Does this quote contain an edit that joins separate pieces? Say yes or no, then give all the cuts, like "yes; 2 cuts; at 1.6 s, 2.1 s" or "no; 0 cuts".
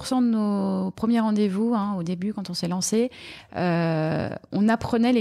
no; 0 cuts